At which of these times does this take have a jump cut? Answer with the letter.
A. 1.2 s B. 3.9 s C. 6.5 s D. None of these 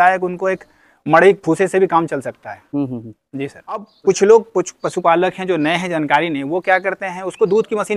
B